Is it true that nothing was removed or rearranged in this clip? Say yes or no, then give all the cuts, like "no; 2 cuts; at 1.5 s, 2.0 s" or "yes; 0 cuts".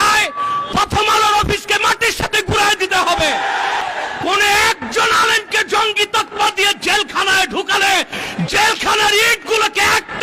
no; 1 cut; at 3.8 s